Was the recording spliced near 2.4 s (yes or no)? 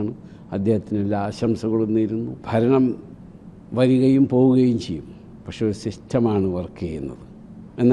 yes